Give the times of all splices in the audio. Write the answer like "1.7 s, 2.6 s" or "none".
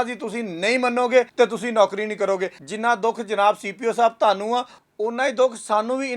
1.3 s, 2.6 s